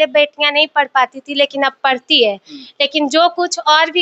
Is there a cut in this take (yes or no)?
no